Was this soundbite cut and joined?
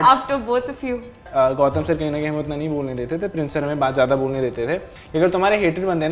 yes; 2 cuts; at 1.2 s, 5.0 s

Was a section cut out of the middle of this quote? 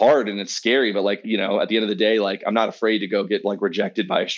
yes; 1 cut; at 1.2 s

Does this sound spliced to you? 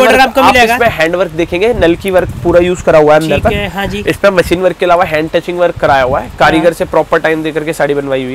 no; 0 cuts

